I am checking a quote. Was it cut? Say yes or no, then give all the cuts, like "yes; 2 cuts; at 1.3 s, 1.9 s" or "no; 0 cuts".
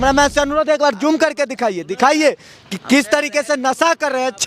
no; 0 cuts